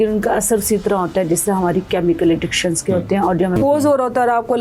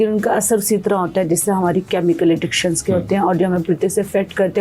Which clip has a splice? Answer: first; 1 cut; at 3.5 s

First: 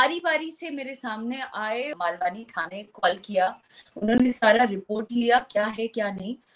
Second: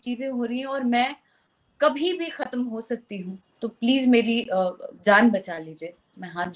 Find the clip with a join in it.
first; 1 cut; at 1.9 s

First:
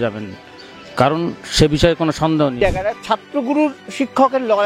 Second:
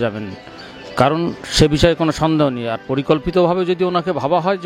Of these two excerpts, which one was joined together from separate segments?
first; 1 cut; at 2.6 s

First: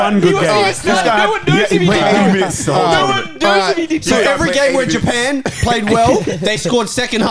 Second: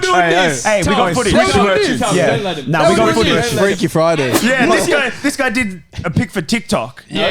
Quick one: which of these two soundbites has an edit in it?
second; 1 cut; at 4.4 s

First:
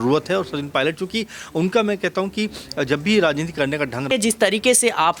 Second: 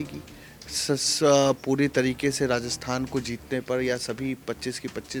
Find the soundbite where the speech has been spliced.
first; 1 cut; at 4.1 s

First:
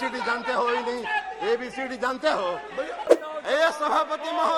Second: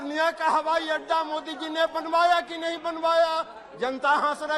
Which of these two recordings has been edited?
first; 1 cut; at 3.1 s

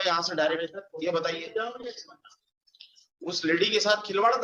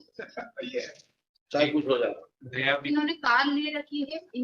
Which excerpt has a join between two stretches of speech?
second; 1 cut; at 2.8 s

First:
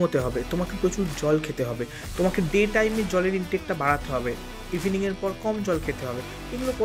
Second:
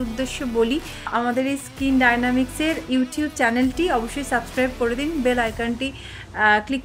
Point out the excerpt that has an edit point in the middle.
second; 1 cut; at 1.1 s

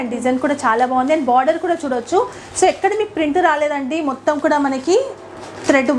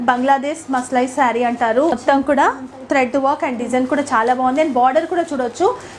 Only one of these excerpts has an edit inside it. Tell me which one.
second; 1 cut; at 2.0 s

